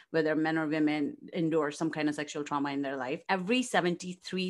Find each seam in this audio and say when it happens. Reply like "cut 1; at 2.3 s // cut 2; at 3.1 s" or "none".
cut 1; at 3.2 s